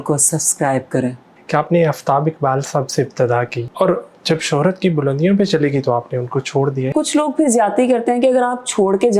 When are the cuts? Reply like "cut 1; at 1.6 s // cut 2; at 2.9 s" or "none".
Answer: cut 1; at 1.3 s // cut 2; at 3.6 s // cut 3; at 6.9 s